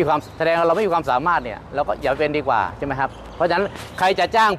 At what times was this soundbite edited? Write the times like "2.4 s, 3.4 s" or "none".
none